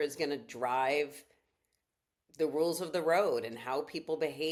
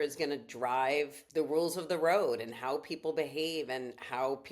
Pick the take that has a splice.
second; 1 cut; at 1.2 s

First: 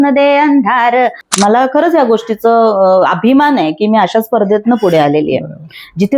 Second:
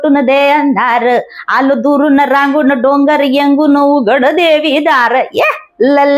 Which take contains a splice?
first; 1 cut; at 1.2 s

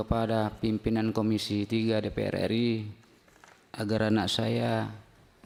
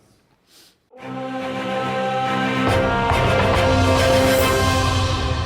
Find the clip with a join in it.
second; 1 cut; at 1.0 s

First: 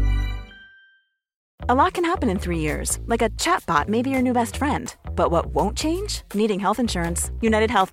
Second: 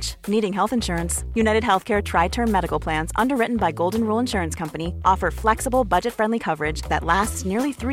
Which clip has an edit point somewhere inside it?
first; 1 cut; at 1.4 s

